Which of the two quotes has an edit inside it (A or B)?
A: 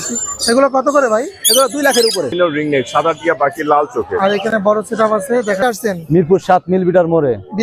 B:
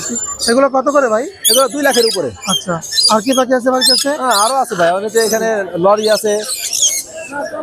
A